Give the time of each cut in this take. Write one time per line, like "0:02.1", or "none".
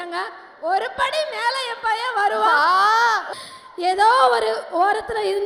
0:03.2